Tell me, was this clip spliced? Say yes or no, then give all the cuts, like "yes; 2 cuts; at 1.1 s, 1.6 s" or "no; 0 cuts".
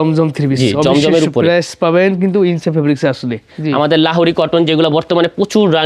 yes; 1 cut; at 3.6 s